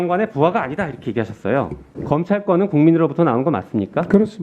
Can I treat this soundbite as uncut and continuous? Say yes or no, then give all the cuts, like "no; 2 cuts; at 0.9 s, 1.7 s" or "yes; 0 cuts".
no; 1 cut; at 1.9 s